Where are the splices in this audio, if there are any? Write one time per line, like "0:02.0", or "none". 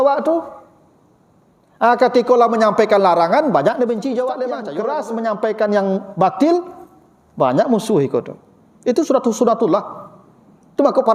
0:04.6